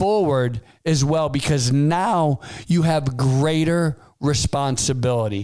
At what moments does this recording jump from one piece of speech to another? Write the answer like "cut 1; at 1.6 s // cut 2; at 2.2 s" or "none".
none